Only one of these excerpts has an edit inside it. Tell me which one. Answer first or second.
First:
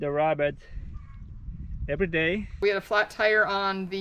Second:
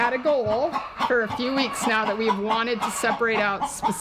first